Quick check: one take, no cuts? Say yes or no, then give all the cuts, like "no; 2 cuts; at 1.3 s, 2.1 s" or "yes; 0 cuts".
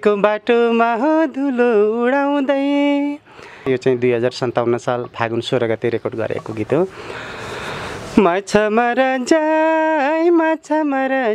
no; 1 cut; at 3.7 s